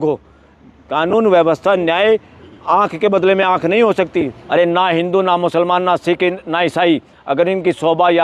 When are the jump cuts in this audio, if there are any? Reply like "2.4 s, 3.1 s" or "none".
4.4 s